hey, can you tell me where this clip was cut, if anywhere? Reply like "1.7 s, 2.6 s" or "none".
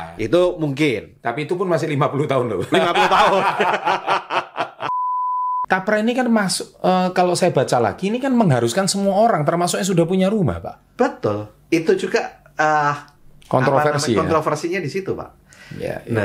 5.3 s